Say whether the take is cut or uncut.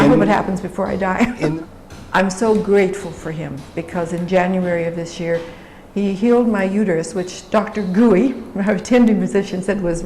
cut